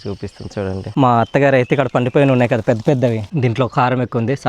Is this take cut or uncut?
cut